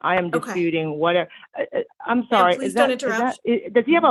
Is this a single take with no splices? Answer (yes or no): yes